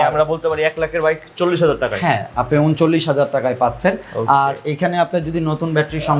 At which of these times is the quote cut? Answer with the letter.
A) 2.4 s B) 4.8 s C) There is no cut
C